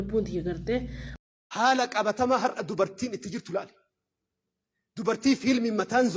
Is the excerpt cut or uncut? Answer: cut